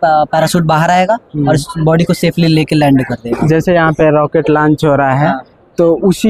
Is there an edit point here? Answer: no; 0 cuts

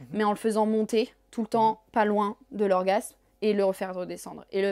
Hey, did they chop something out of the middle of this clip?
no; 0 cuts

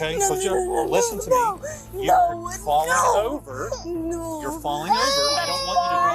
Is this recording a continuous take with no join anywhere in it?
yes; 0 cuts

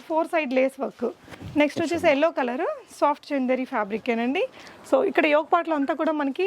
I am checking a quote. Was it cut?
no; 0 cuts

